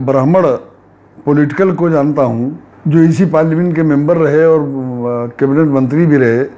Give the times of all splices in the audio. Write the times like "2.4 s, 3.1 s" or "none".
2.7 s